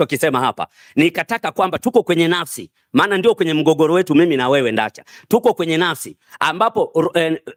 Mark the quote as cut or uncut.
uncut